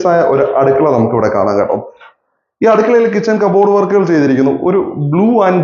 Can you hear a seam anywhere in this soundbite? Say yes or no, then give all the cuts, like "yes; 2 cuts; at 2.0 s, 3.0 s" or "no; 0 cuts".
no; 0 cuts